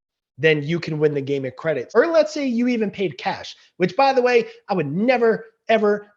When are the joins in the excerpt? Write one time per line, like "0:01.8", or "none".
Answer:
0:01.8